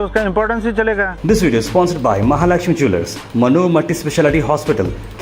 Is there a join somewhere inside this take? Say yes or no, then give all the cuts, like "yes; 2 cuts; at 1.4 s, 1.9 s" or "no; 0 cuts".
yes; 1 cut; at 1.1 s